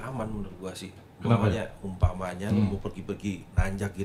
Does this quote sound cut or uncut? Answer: uncut